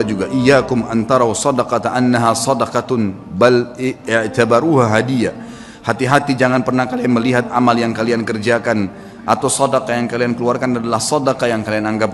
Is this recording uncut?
yes; 0 cuts

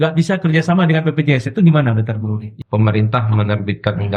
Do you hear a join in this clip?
yes; 1 cut; at 2.5 s

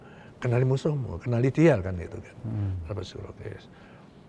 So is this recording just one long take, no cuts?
yes; 0 cuts

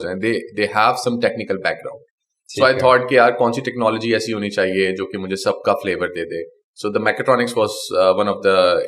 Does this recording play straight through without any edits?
yes; 0 cuts

